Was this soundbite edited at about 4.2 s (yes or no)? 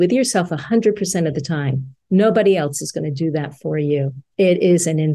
yes